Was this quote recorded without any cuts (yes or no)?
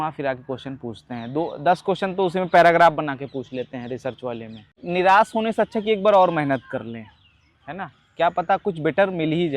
no